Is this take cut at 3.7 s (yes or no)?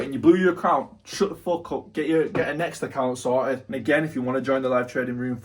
yes